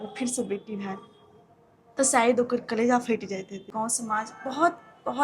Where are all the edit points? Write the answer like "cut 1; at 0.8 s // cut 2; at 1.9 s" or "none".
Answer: cut 1; at 3.7 s

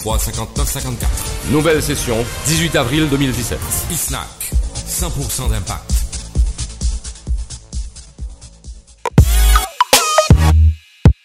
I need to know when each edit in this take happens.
cut 1; at 9.1 s

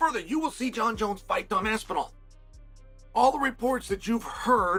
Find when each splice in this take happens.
none

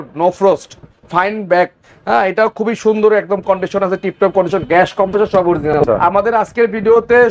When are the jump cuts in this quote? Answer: cut 1; at 5.8 s

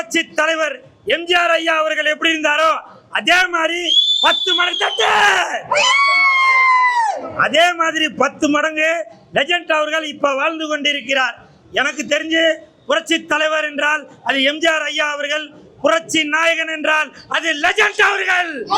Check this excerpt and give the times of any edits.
none

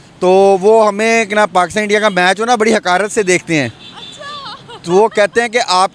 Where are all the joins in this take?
none

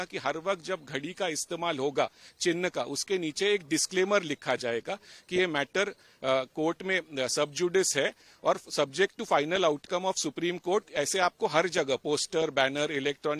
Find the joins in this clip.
none

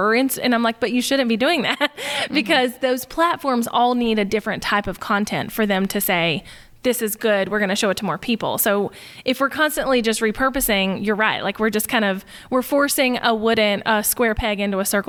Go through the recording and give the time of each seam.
none

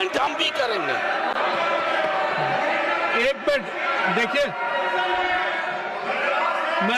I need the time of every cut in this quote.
none

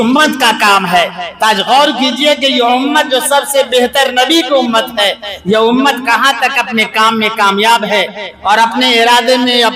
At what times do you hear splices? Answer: none

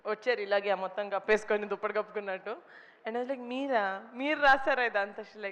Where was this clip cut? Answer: none

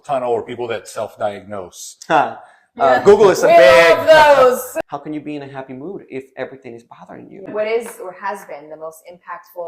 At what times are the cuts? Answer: cut 1; at 4.7 s // cut 2; at 7.5 s

